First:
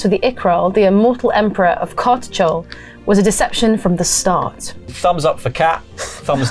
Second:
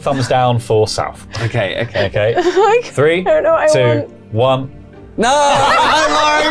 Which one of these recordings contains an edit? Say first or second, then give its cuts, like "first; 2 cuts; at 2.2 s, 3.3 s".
first; 1 cut; at 4.9 s